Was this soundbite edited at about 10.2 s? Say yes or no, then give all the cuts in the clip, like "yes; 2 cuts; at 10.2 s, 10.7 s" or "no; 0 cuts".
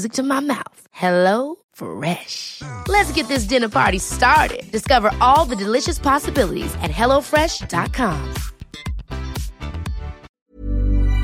yes; 1 cut; at 10.2 s